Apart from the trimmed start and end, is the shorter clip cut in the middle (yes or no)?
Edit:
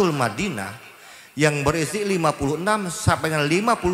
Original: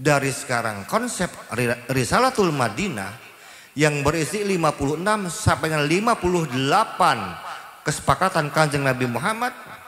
no